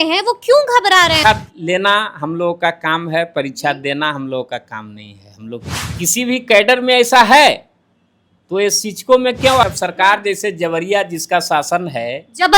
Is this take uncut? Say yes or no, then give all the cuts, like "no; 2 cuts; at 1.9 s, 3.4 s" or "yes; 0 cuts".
no; 3 cuts; at 1.2 s, 5.8 s, 9.6 s